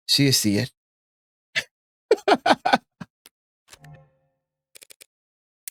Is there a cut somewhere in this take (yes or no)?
no